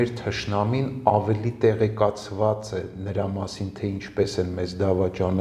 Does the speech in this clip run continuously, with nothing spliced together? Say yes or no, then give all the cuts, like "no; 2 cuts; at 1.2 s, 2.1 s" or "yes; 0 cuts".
yes; 0 cuts